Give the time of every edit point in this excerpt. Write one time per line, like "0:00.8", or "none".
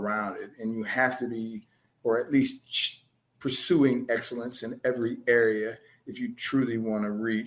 none